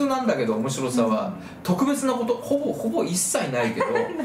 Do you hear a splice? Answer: no; 0 cuts

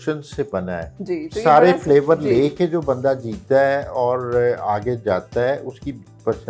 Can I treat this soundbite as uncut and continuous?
no; 1 cut; at 0.9 s

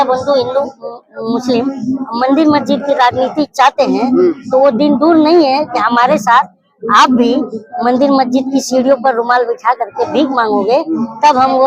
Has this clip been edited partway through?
no; 0 cuts

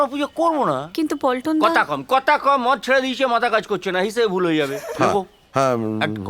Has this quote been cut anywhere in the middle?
no; 0 cuts

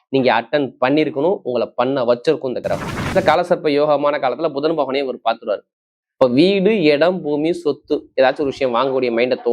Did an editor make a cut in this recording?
yes; 1 cut; at 3.1 s

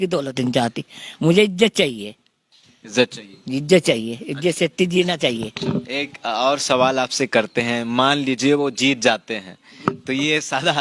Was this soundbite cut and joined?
no; 0 cuts

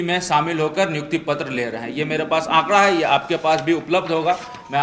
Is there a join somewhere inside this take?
no; 0 cuts

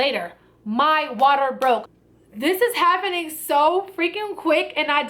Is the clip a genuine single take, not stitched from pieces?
no; 1 cut; at 1.9 s

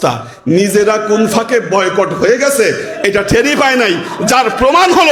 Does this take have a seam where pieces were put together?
no; 0 cuts

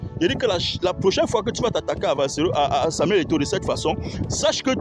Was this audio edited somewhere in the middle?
no; 0 cuts

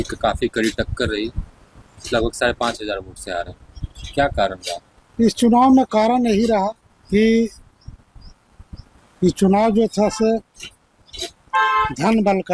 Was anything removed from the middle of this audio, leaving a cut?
no; 0 cuts

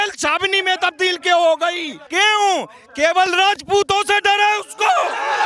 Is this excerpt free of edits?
no; 1 cut; at 2.0 s

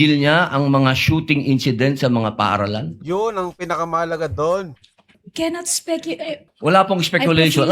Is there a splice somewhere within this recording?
yes; 2 cuts; at 5.2 s, 6.5 s

